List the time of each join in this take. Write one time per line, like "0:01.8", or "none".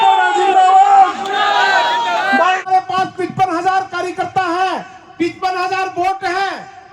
0:02.6